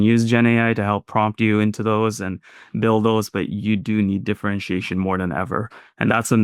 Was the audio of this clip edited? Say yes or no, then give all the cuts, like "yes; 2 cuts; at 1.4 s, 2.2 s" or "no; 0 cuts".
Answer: no; 0 cuts